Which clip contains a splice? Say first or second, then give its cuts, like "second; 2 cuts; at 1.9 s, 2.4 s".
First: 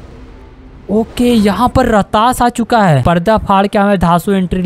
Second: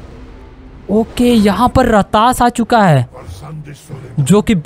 first; 1 cut; at 3.0 s